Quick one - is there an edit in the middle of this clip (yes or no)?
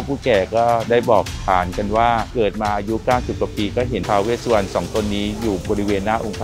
no